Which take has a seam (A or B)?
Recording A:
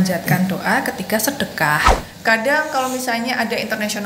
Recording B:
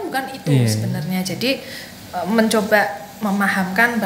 A